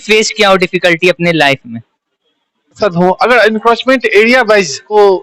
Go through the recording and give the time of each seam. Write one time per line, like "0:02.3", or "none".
0:02.8

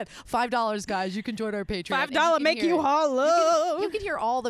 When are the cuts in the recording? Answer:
none

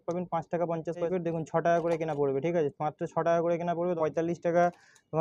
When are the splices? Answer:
0:01.1
0:04.0

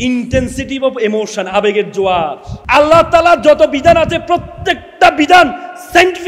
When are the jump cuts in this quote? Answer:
0:02.5

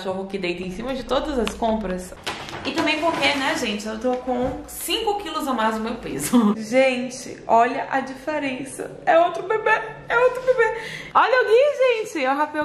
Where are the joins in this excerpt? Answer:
0:02.1
0:06.6
0:10.9

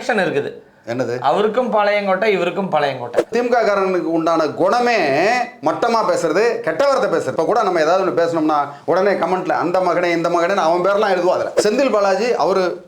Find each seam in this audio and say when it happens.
0:03.3
0:11.5

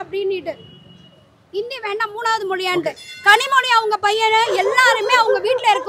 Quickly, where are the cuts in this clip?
none

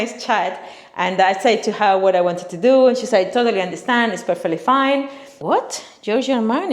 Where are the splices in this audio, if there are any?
0:05.2

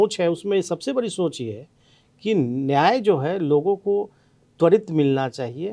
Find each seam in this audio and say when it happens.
none

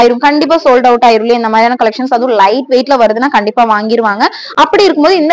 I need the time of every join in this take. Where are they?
none

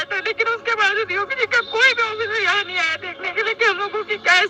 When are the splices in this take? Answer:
none

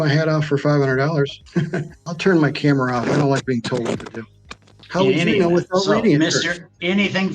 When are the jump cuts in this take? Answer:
0:01.9
0:04.7

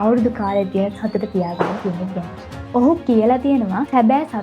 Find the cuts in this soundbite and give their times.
0:02.6

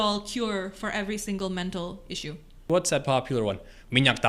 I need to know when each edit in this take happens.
0:02.7

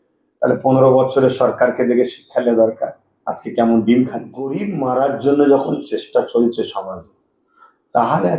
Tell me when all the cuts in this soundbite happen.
0:04.6

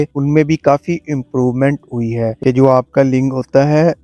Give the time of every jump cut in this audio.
0:02.4

